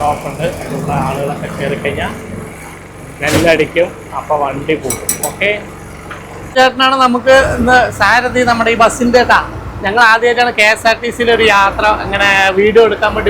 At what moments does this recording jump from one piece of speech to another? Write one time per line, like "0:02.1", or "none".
0:06.5